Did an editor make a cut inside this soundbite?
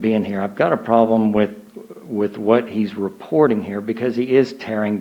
no; 0 cuts

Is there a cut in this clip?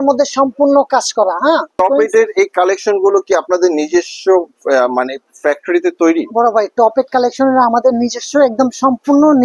yes; 1 cut; at 1.8 s

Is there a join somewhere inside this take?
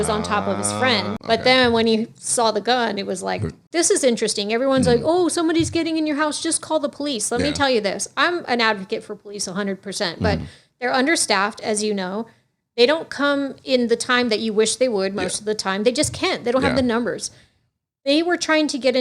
yes; 2 cuts; at 1.1 s, 3.6 s

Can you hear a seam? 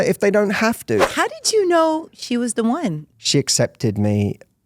yes; 2 cuts; at 1.1 s, 3.0 s

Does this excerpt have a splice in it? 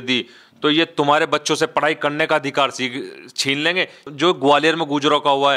yes; 1 cut; at 4.1 s

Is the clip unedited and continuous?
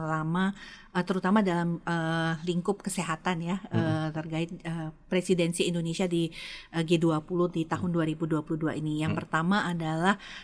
yes; 0 cuts

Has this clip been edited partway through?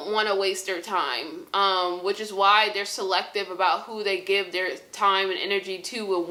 no; 0 cuts

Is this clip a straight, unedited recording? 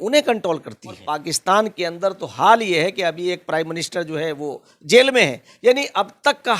no; 1 cut; at 1.1 s

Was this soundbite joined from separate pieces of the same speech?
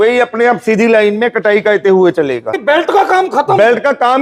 yes; 1 cut; at 2.5 s

